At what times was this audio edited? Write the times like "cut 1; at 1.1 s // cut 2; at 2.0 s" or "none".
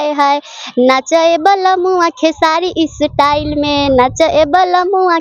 none